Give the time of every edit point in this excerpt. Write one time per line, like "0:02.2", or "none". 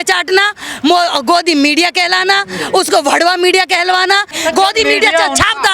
0:04.3

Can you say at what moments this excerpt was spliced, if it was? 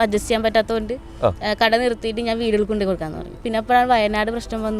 0:03.4

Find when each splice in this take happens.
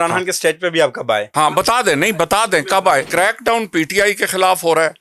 0:01.3
0:03.1

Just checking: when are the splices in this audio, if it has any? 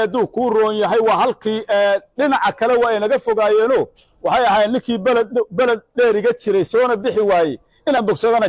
none

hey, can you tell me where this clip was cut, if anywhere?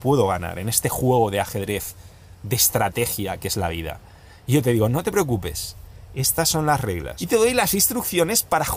0:07.1

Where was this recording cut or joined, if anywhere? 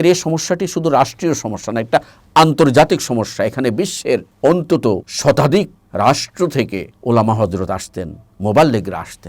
0:04.3
0:05.1
0:05.8
0:06.9

